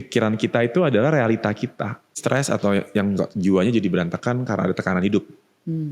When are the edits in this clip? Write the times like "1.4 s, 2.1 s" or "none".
2.1 s